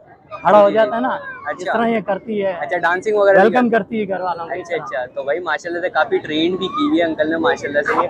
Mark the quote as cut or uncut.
uncut